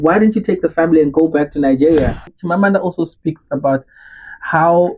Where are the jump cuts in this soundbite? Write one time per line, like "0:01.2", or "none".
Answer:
0:02.3